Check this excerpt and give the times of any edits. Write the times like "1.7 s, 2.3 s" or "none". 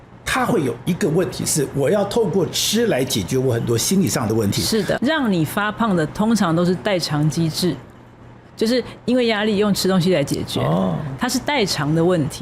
5.0 s